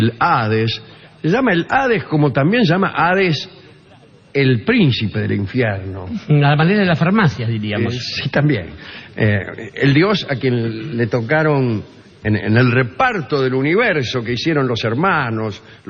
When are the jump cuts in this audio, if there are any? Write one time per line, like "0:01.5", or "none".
0:13.5